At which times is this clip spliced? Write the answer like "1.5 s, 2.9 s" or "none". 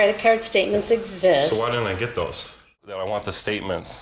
2.8 s